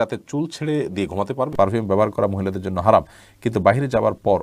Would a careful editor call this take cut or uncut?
cut